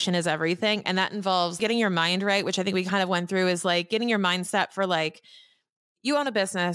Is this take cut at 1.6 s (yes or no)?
yes